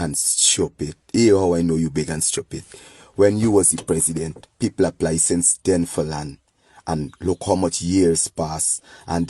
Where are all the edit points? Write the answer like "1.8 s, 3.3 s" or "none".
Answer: 7.1 s